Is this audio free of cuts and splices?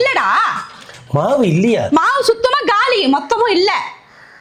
yes; 0 cuts

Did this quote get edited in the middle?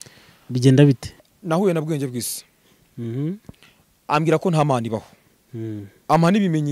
yes; 1 cut; at 1.2 s

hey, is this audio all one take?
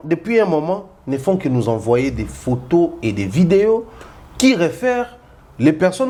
yes; 0 cuts

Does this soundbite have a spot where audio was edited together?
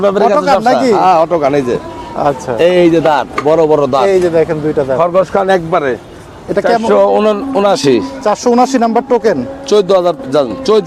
no; 0 cuts

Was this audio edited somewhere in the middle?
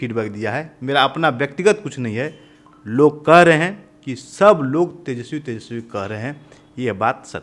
no; 0 cuts

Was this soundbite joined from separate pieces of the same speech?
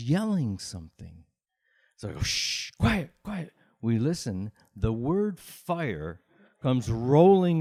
no; 0 cuts

